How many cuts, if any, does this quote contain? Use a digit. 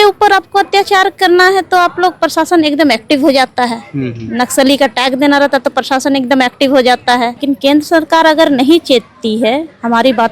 1